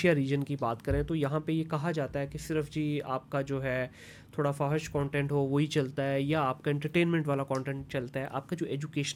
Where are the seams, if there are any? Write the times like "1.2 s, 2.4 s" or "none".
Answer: none

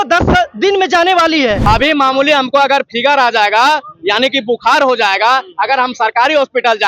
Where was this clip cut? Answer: 1.6 s

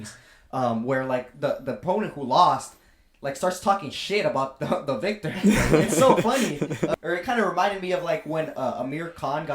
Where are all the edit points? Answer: 7.0 s

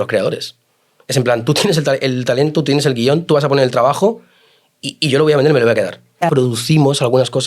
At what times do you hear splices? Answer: 6.2 s

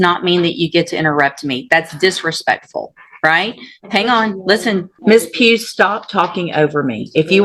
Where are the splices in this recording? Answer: 4.9 s

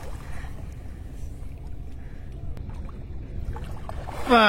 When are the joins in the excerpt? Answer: 2.6 s

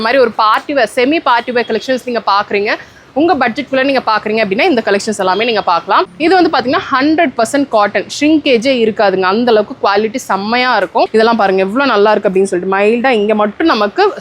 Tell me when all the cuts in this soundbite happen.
6.1 s, 11.1 s

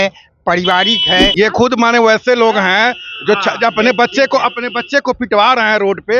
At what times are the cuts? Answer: 1.3 s

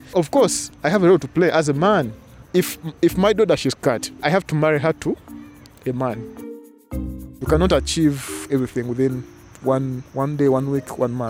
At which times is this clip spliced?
2.5 s, 6.8 s

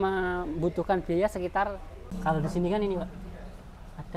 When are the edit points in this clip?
2.0 s

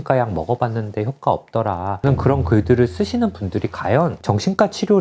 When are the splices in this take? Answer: 2.0 s

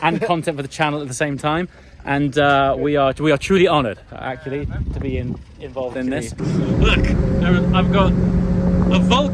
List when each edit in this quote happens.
6.4 s

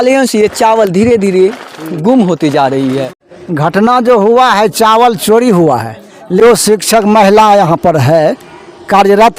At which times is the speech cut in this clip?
3.2 s, 6.4 s

